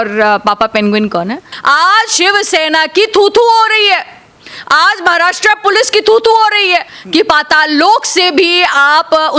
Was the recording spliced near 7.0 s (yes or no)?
yes